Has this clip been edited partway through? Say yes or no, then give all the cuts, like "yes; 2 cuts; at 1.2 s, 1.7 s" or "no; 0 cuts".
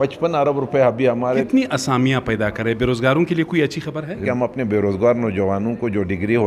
yes; 2 cuts; at 1.4 s, 4.2 s